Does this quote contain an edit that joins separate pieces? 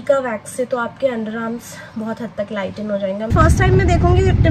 yes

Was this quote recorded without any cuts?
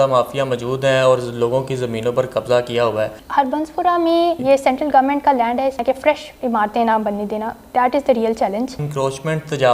no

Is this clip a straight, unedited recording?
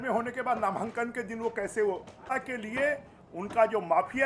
no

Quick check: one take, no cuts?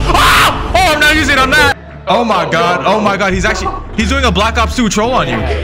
no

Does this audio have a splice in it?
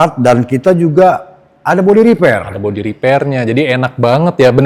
no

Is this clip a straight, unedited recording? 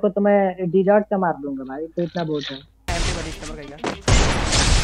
no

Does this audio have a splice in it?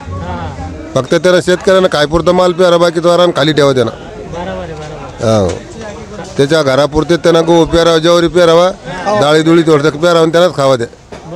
no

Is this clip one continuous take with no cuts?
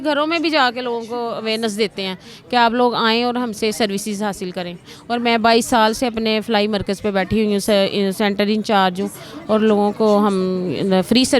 yes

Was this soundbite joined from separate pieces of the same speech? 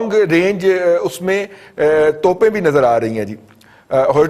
no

